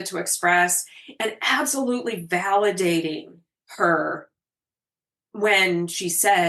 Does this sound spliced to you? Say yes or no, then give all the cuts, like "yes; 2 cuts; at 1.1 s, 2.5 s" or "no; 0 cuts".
no; 0 cuts